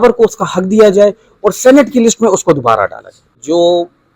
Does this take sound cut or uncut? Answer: cut